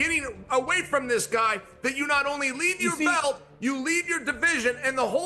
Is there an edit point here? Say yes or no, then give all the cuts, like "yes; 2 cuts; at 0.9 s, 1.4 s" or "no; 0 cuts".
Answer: no; 0 cuts